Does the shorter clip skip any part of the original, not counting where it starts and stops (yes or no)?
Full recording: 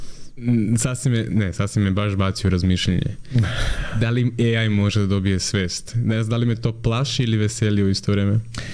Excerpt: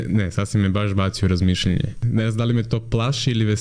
yes